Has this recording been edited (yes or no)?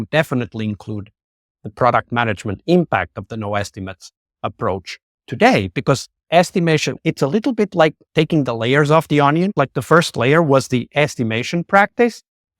yes